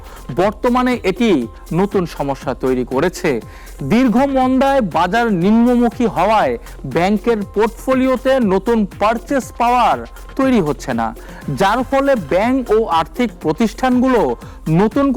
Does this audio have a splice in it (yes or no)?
no